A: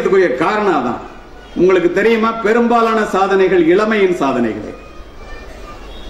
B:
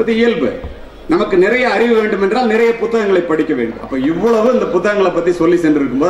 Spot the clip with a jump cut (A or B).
B